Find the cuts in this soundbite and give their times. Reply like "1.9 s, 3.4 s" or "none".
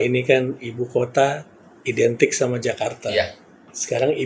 none